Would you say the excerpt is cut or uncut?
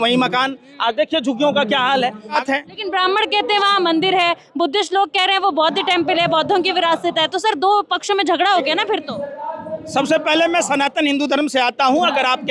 cut